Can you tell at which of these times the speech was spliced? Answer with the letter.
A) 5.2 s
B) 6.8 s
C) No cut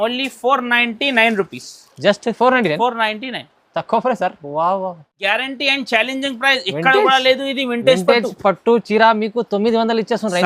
A